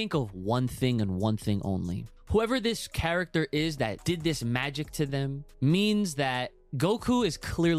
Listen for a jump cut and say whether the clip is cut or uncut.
cut